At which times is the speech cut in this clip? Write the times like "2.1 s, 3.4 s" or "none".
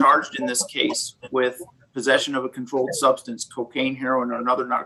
none